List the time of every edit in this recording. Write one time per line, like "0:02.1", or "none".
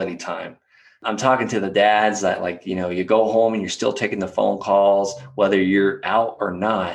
0:01.1